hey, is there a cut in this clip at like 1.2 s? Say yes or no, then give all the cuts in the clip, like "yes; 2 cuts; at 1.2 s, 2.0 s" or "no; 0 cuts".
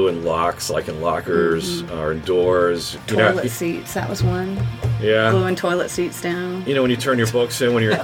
no; 1 cut; at 2.9 s